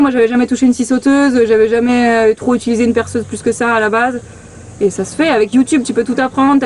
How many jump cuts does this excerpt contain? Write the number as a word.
zero